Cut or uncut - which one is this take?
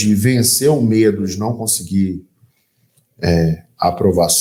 uncut